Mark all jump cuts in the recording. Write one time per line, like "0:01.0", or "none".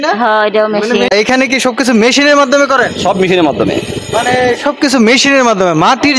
0:01.1